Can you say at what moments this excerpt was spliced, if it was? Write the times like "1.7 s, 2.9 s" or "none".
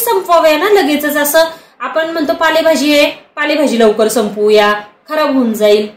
none